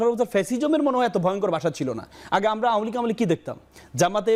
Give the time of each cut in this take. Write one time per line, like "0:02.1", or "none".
none